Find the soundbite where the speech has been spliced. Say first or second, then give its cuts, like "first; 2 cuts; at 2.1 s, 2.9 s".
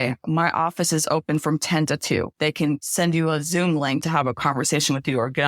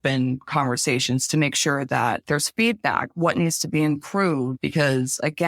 first; 2 cuts; at 2.6 s, 4.0 s